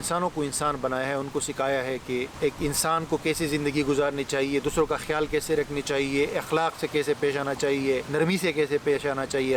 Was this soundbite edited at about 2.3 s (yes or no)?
yes